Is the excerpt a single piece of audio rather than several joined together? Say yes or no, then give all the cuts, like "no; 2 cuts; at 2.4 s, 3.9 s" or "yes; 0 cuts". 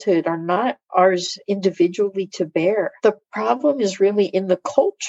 no; 1 cut; at 2.9 s